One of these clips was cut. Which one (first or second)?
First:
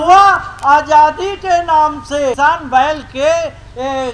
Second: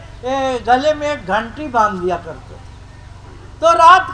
first